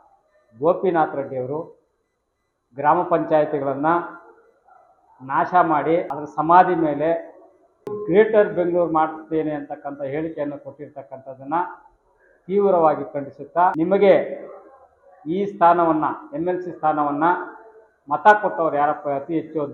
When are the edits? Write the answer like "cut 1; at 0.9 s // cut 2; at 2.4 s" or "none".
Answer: cut 1; at 6.2 s // cut 2; at 8.0 s // cut 3; at 13.7 s